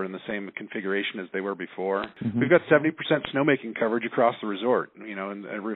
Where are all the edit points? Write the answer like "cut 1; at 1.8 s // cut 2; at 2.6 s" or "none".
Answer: cut 1; at 2.1 s